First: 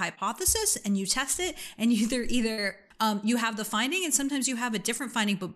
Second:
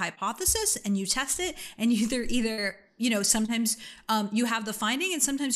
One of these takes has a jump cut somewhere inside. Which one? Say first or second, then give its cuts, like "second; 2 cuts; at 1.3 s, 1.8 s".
first; 1 cut; at 2.8 s